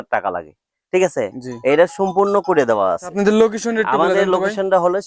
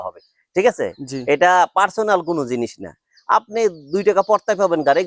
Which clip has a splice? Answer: first; 1 cut; at 3.1 s

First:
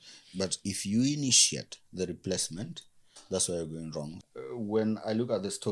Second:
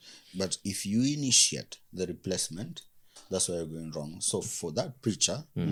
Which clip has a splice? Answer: first; 1 cut; at 4.2 s

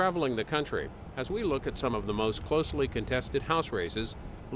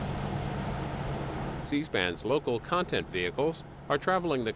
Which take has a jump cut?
second; 1 cut; at 1.6 s

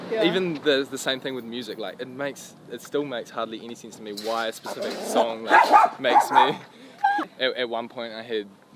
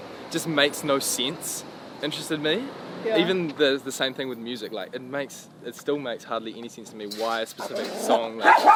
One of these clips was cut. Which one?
first; 1 cut; at 7.3 s

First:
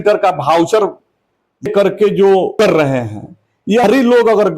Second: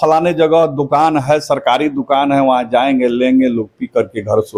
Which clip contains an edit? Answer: first; 3 cuts; at 1.7 s, 2.5 s, 3.8 s

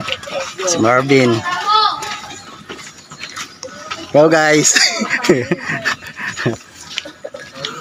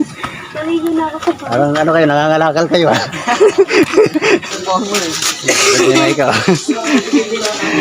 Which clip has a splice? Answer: second; 1 cut; at 4.4 s

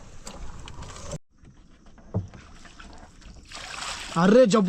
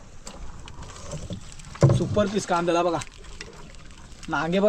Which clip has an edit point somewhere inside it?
first; 1 cut; at 1.2 s

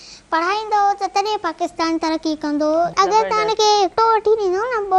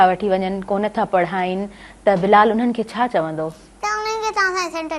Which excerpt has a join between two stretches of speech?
first; 1 cut; at 2.9 s

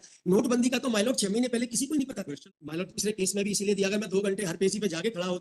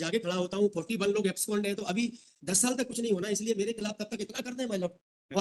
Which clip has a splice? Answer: first; 1 cut; at 2.5 s

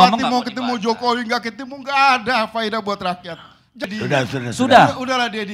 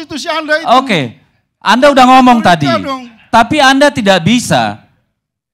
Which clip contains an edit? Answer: first; 1 cut; at 3.8 s

